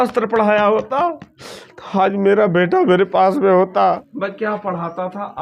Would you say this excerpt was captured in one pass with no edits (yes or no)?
no